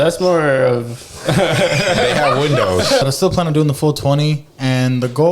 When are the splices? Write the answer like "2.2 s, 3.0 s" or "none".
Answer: 3.0 s